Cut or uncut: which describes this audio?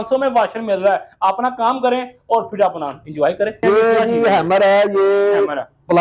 cut